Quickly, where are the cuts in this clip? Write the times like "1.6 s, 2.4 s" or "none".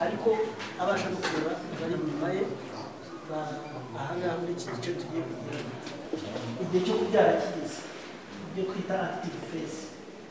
6.0 s